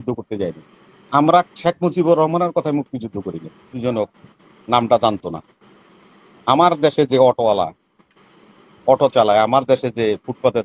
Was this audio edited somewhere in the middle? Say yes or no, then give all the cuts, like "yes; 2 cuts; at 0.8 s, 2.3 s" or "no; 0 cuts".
yes; 1 cut; at 3.7 s